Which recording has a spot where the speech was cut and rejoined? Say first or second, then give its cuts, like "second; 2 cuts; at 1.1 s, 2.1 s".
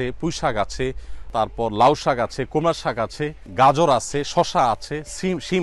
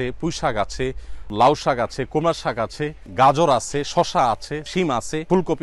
second; 2 cuts; at 1.3 s, 4.7 s